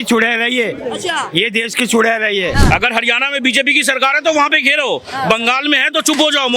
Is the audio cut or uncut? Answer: cut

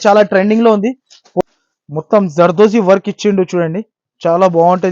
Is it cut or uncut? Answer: cut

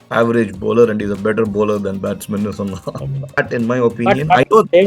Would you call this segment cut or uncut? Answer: cut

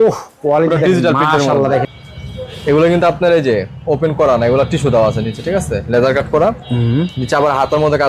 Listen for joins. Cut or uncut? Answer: cut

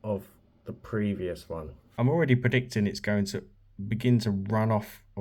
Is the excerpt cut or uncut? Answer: cut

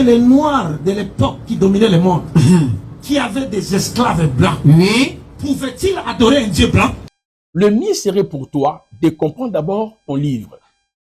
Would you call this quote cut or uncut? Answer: cut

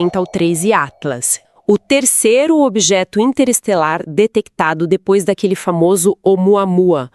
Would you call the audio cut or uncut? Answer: cut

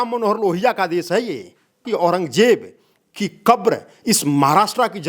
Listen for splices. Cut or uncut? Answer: cut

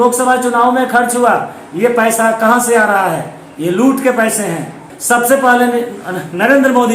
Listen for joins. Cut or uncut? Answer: cut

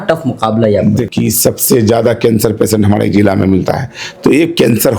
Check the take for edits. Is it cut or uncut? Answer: cut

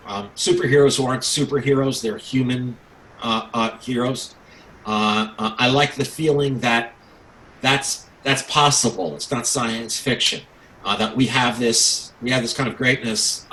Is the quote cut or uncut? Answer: uncut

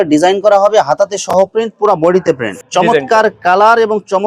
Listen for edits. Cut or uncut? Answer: cut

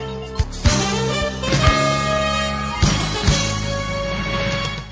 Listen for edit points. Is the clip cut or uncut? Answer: uncut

